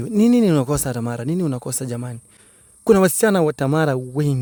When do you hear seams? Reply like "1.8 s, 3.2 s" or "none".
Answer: none

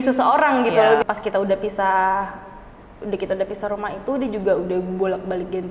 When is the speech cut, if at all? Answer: 1.0 s

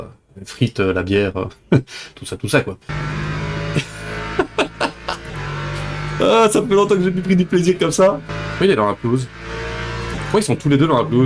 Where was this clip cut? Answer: 2.9 s, 8.3 s

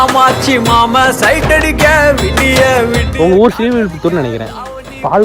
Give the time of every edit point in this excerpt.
3.1 s

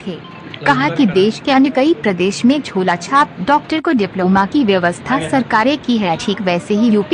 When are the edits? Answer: none

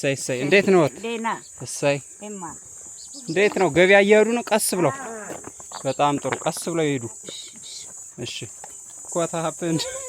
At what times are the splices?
9.1 s

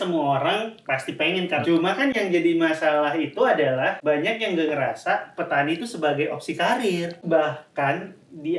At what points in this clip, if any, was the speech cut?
1.6 s, 4.0 s, 7.2 s

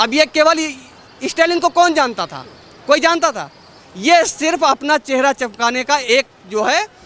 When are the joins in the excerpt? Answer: none

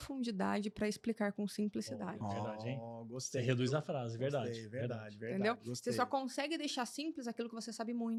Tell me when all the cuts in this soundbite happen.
none

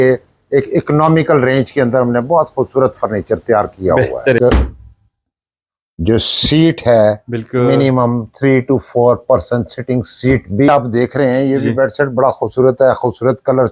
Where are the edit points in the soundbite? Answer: 4.4 s, 10.7 s

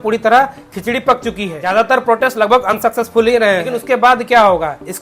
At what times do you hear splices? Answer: 1.5 s, 3.7 s

